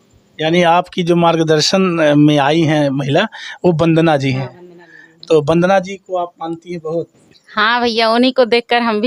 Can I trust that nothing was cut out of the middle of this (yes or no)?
yes